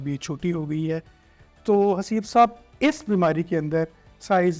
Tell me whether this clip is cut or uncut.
uncut